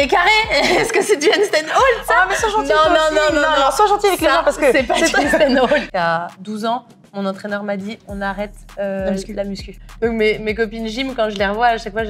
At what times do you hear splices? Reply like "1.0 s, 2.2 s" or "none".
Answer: 5.9 s, 9.8 s